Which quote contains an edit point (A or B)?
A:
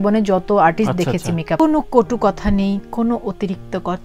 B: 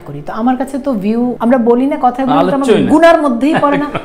B